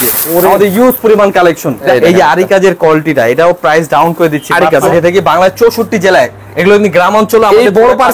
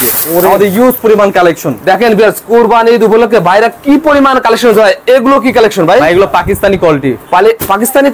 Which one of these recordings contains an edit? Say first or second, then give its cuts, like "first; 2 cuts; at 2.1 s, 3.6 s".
first; 2 cuts; at 1.9 s, 4.9 s